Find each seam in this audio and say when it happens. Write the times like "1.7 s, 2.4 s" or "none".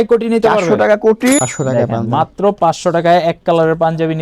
1.4 s